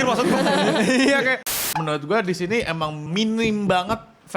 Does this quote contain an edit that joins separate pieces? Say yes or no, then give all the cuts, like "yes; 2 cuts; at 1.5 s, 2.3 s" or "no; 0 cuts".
yes; 2 cuts; at 1.6 s, 3.1 s